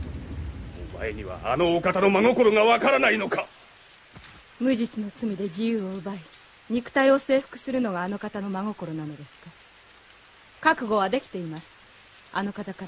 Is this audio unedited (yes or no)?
yes